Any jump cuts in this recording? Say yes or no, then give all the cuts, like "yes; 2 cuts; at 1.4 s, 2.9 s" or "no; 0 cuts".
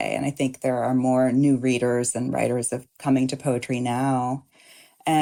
no; 0 cuts